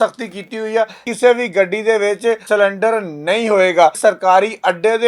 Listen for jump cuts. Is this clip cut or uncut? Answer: cut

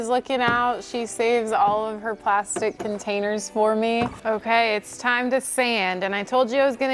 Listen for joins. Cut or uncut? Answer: cut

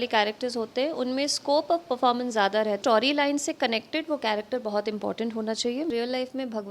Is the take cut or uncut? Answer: cut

